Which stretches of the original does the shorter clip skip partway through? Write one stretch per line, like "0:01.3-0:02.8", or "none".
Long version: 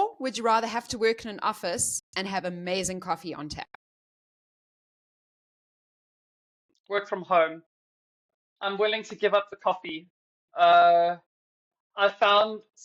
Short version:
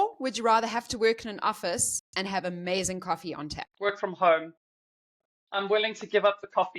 0:03.6-0:06.7